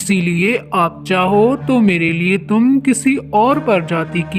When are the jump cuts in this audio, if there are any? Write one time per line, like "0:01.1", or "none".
none